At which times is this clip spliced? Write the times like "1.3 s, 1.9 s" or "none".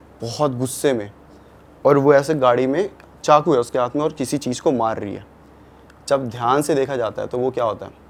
none